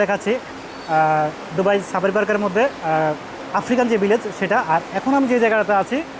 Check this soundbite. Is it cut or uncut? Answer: uncut